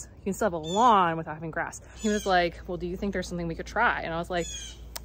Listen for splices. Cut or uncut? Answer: cut